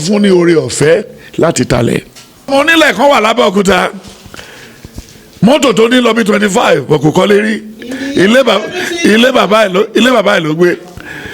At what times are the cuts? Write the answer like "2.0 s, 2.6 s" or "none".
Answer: 2.5 s